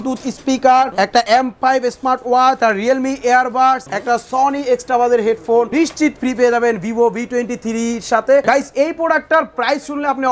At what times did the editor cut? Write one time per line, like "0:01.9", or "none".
0:01.2
0:02.6
0:03.9
0:05.7
0:08.4